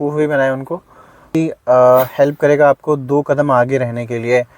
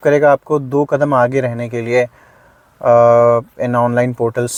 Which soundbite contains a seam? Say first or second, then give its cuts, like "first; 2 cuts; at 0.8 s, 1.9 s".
first; 1 cut; at 1.3 s